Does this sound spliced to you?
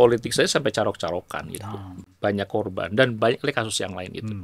no; 0 cuts

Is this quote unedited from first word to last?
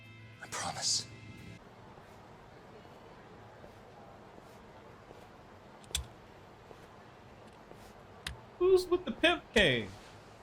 no; 1 cut; at 1.6 s

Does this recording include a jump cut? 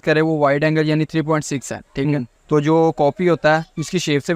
yes; 1 cut; at 2.3 s

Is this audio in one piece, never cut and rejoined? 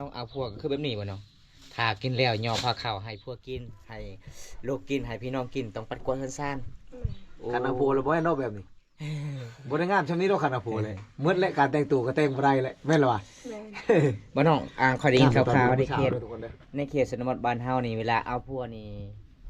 yes; 0 cuts

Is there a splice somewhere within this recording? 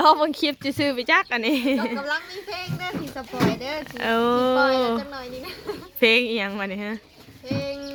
no; 0 cuts

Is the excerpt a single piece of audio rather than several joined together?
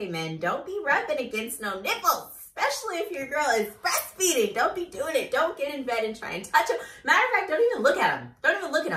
yes; 0 cuts

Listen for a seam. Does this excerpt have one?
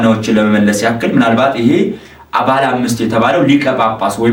no; 0 cuts

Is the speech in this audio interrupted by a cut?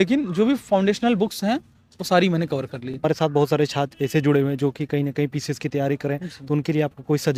no; 0 cuts

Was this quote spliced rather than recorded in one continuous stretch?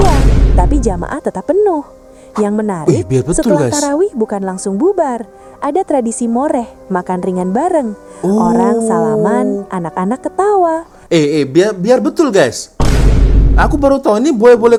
no; 0 cuts

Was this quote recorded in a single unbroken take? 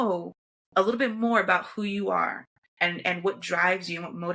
yes; 0 cuts

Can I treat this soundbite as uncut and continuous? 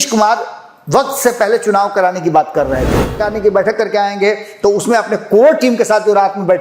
no; 1 cut; at 3.2 s

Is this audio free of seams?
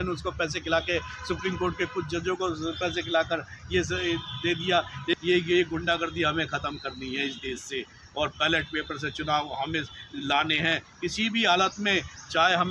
no; 1 cut; at 5.1 s

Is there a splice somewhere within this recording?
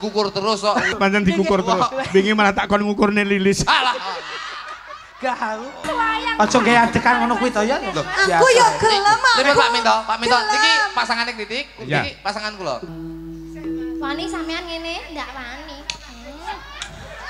yes; 3 cuts; at 0.9 s, 5.9 s, 12.8 s

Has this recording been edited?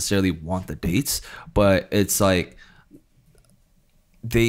no; 0 cuts

